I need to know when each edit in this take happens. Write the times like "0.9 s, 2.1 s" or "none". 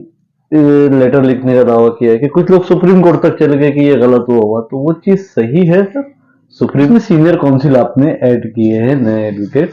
6.9 s